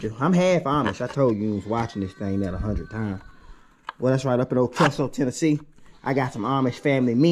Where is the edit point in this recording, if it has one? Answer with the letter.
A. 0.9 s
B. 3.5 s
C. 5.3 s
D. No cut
D